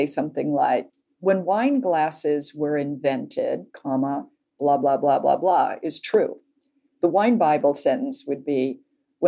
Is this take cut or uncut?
uncut